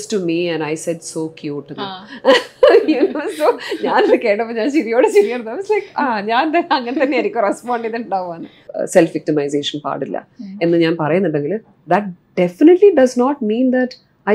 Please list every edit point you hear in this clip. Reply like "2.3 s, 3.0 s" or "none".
8.7 s